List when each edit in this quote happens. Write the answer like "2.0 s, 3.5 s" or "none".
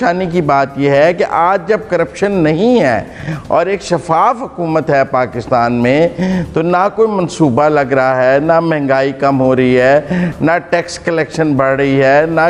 none